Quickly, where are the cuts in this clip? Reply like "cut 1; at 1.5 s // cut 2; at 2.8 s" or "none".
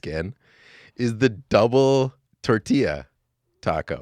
cut 1; at 2.3 s

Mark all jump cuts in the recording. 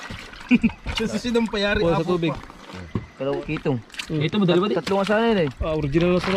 cut 1; at 3.4 s

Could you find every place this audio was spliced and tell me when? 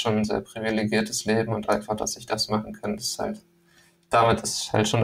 none

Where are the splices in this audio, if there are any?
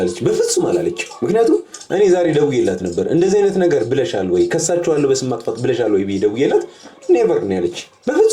none

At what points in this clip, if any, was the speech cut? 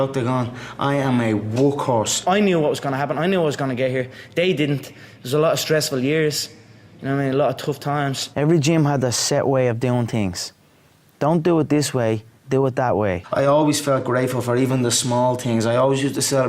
cut 1; at 2.2 s // cut 2; at 8.2 s // cut 3; at 13.2 s

